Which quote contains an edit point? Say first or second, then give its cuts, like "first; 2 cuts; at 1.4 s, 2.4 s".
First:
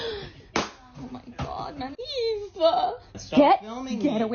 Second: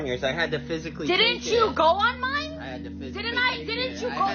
first; 1 cut; at 3.2 s